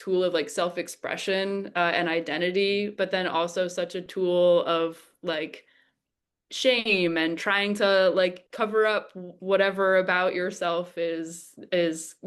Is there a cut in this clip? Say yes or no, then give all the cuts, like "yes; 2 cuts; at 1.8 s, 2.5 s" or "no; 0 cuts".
no; 0 cuts